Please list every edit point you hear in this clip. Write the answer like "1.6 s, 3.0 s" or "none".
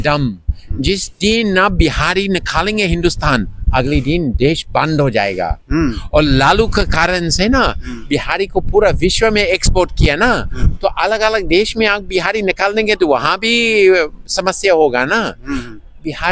none